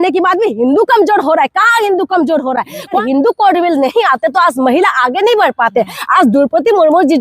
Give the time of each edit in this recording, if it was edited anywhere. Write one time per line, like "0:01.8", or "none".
0:03.0